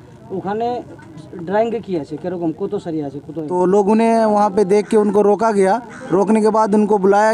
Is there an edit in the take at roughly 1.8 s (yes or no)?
no